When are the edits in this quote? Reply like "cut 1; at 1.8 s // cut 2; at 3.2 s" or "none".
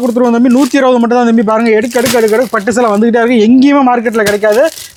none